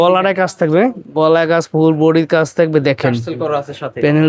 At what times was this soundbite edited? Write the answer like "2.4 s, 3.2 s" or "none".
none